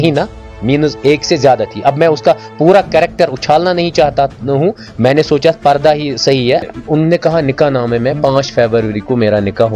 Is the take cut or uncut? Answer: cut